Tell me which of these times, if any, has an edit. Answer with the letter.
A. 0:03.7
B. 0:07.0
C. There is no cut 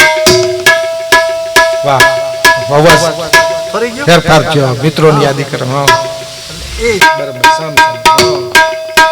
B